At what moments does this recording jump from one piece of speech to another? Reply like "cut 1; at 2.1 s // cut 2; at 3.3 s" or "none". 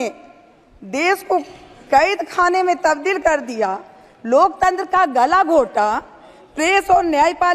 none